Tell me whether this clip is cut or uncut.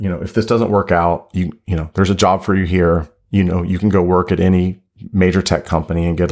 uncut